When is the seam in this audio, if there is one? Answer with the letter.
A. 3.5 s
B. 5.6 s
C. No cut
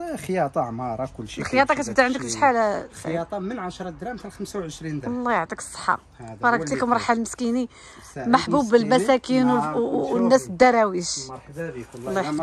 C